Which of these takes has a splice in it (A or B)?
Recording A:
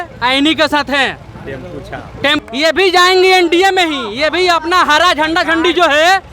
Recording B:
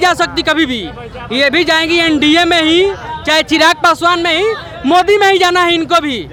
A